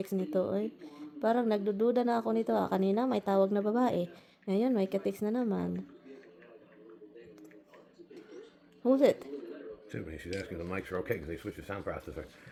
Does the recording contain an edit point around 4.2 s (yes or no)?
no